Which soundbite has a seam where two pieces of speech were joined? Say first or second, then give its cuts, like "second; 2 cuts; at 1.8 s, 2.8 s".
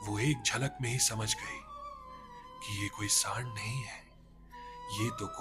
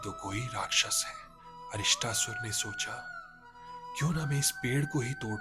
second; 1 cut; at 1.6 s